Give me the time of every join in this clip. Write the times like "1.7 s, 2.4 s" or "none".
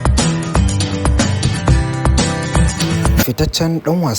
3.2 s